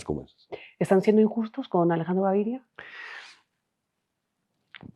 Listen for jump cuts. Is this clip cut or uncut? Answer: uncut